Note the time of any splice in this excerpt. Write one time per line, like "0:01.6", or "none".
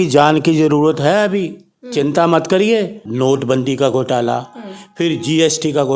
0:03.0